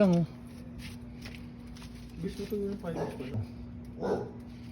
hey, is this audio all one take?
no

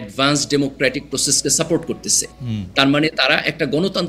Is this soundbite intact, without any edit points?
yes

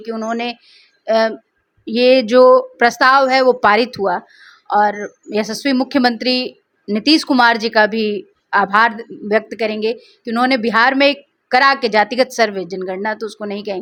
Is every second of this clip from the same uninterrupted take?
yes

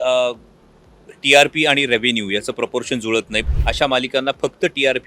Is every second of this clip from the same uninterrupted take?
no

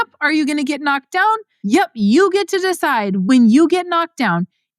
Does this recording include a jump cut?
yes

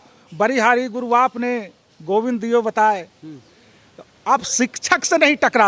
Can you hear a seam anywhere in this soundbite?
no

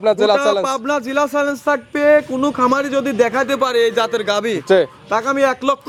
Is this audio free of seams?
yes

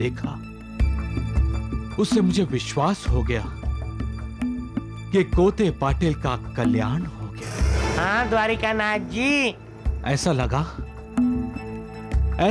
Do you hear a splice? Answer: no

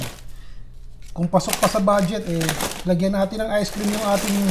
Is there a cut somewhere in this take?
no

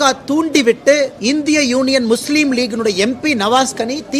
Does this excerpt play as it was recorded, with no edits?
yes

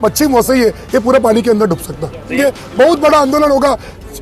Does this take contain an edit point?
yes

